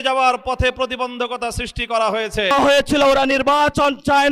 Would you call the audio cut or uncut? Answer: cut